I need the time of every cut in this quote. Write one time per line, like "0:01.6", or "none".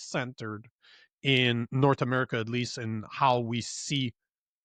none